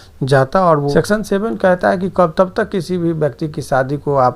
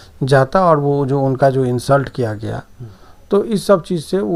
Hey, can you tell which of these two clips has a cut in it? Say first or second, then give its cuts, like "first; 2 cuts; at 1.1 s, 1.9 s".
first; 1 cut; at 0.9 s